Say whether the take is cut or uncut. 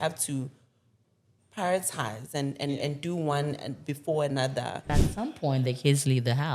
cut